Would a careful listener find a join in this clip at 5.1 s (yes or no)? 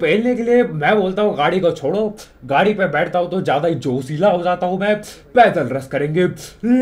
no